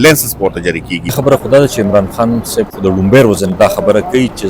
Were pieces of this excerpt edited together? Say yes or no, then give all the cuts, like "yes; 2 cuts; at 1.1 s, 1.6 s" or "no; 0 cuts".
yes; 1 cut; at 1.2 s